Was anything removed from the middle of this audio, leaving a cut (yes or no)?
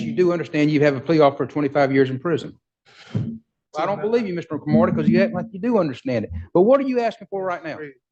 yes